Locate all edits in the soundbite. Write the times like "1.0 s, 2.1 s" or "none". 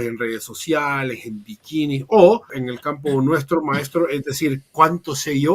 2.6 s